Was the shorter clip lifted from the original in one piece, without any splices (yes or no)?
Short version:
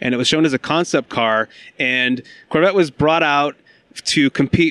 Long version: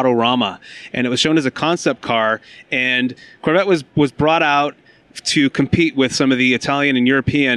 no